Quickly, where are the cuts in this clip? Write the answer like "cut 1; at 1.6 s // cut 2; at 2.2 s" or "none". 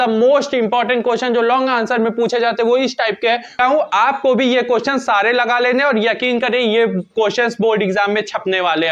cut 1; at 3.6 s